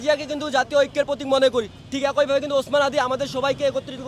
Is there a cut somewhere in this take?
no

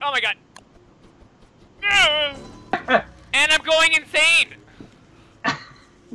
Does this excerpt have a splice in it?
yes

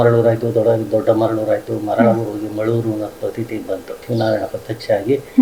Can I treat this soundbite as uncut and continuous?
no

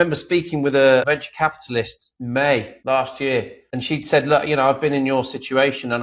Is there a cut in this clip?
yes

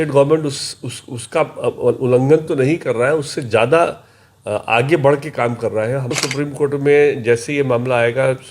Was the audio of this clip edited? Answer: yes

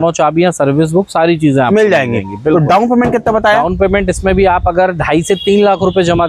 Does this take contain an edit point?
no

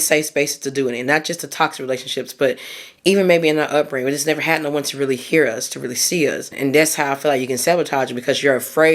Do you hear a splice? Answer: yes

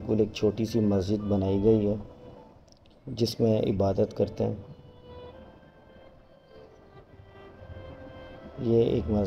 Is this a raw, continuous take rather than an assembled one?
yes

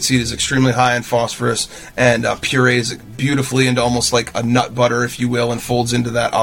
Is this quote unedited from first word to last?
yes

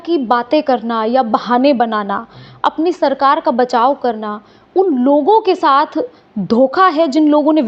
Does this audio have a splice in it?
no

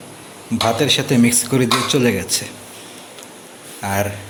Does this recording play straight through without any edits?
yes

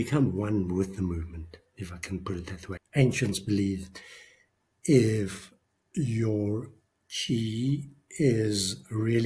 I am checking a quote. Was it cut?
yes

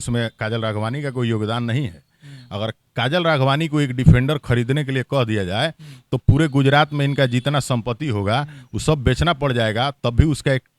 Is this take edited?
no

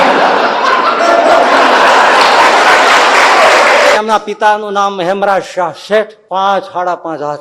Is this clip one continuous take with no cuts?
no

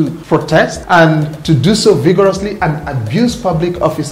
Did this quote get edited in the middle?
yes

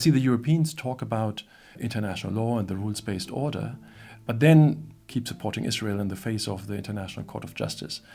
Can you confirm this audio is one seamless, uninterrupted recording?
no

